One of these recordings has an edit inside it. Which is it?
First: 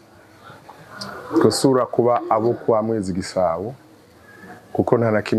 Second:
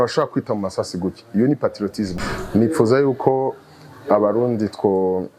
second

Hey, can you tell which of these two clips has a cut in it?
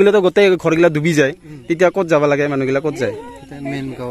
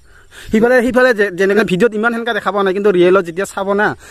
second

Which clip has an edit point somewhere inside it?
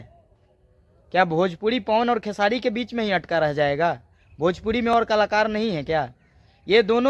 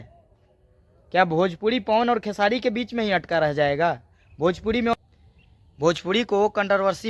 second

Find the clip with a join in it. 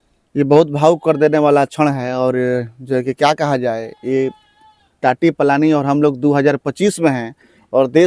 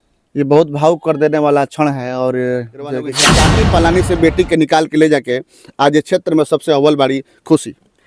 second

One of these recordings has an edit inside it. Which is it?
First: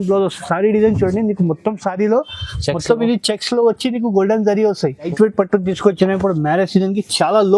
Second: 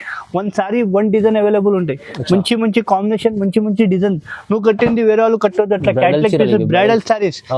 first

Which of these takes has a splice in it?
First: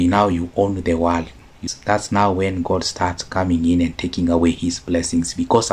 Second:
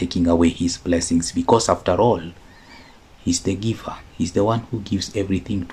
first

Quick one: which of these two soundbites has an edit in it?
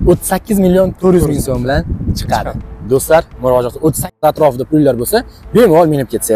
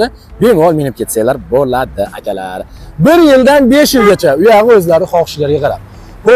first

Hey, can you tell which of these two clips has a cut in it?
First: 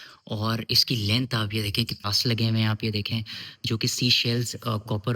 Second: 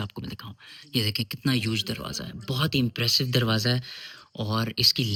first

